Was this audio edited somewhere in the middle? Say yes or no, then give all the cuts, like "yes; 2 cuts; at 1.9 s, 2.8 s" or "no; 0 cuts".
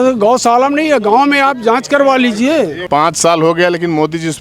yes; 1 cut; at 2.8 s